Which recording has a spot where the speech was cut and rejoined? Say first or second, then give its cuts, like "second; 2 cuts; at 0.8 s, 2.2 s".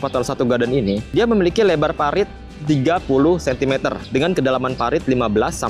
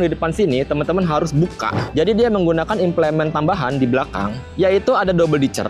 second; 1 cut; at 1.8 s